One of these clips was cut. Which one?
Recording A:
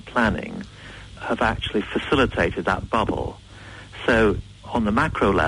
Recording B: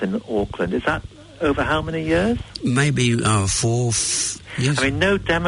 B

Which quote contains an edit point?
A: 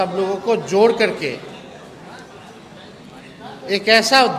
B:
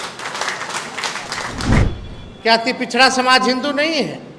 B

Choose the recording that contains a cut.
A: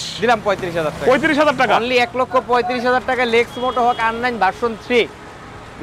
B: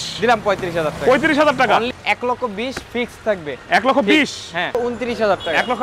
B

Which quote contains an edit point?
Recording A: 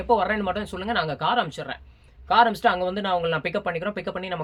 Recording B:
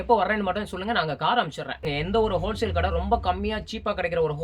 B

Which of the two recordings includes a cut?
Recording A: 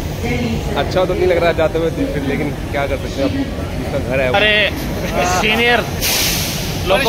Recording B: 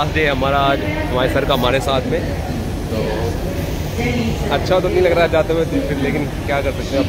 A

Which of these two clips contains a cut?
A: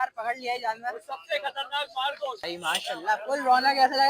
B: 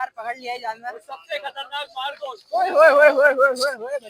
A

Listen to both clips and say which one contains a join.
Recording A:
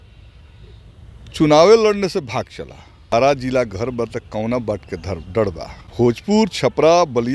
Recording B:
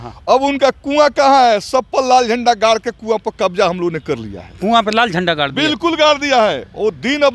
A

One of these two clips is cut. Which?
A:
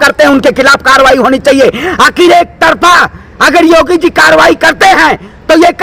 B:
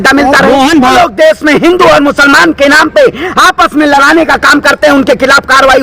B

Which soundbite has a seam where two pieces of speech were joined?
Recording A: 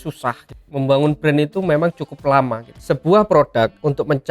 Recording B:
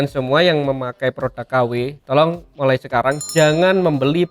A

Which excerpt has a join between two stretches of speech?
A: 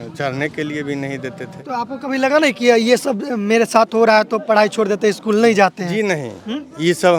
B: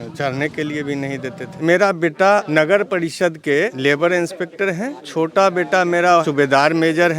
B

